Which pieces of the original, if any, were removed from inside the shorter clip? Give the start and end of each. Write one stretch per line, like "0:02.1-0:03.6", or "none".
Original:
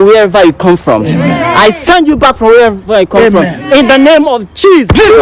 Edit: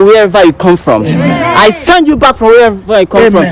none